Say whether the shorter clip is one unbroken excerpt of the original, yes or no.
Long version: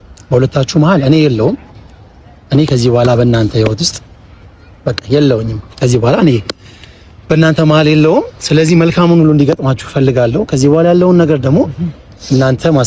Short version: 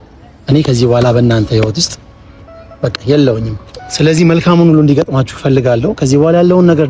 no